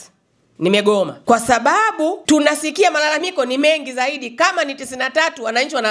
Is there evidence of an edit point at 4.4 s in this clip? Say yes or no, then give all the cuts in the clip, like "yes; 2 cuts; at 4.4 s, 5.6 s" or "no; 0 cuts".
no; 2 cuts; at 1.2 s, 2.2 s